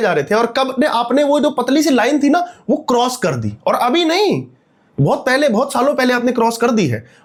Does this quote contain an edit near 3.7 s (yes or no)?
no